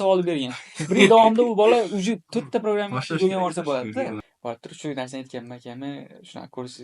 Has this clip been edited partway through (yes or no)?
yes